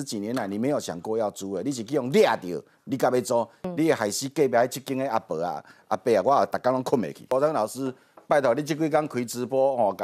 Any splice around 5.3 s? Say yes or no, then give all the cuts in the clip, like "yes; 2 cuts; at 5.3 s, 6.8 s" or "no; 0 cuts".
no; 2 cuts; at 3.7 s, 7.2 s